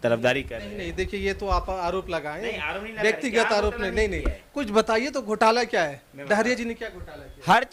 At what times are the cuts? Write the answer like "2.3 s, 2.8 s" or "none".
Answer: none